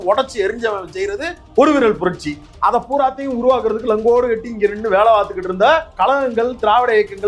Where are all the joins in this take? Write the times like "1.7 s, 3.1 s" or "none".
5.9 s